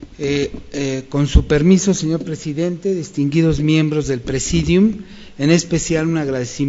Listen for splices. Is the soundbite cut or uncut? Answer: uncut